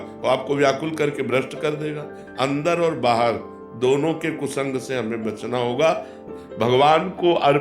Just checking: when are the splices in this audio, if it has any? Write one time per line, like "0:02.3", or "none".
0:06.2